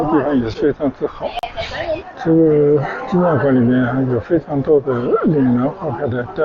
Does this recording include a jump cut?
yes; 1 cut; at 2.0 s

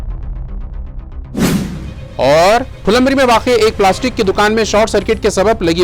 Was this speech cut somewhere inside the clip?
no; 0 cuts

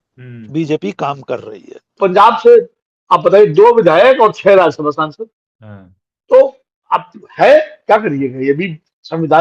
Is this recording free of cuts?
no; 1 cut; at 2.0 s

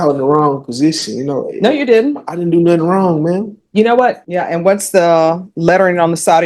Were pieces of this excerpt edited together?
yes; 1 cut; at 4.2 s

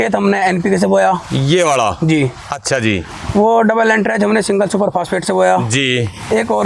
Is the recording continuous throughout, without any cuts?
yes; 0 cuts

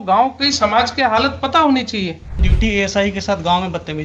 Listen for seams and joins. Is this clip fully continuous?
no; 1 cut; at 2.5 s

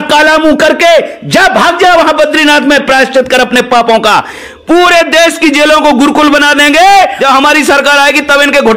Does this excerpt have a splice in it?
yes; 2 cuts; at 4.5 s, 7.2 s

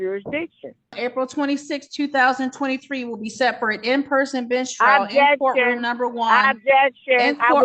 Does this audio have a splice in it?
yes; 1 cut; at 1.0 s

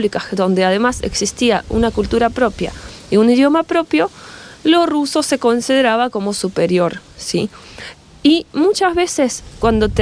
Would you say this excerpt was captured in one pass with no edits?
yes; 0 cuts

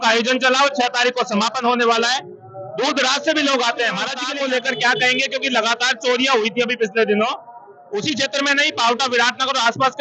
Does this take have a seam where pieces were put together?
yes; 1 cut; at 4.2 s

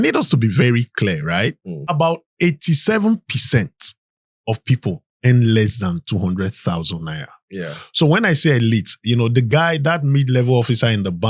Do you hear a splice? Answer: yes; 1 cut; at 1.9 s

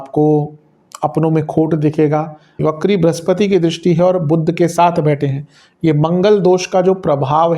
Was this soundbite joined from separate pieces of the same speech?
yes; 1 cut; at 2.6 s

